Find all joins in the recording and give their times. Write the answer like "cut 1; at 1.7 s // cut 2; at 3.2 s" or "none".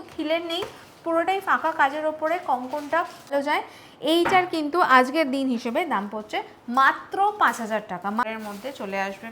cut 1; at 3.3 s // cut 2; at 8.2 s